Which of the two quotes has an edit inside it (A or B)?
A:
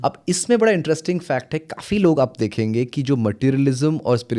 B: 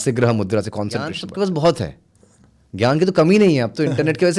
B